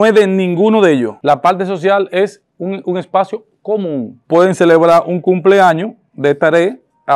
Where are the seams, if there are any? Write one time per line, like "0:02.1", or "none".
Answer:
0:04.2